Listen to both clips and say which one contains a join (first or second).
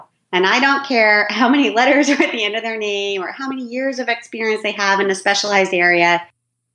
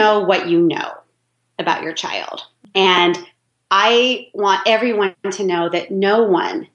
second